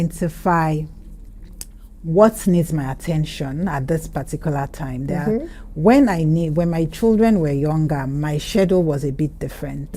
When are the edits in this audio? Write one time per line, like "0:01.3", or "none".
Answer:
none